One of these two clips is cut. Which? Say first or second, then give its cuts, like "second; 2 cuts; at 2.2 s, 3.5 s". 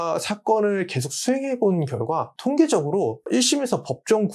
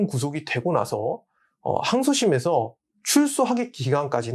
first; 2 cuts; at 2.3 s, 3.3 s